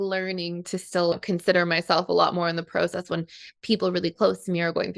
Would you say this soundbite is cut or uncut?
cut